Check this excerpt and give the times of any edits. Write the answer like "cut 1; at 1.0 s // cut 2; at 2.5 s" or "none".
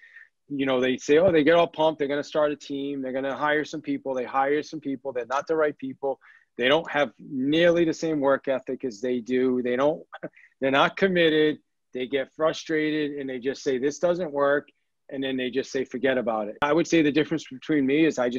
cut 1; at 16.6 s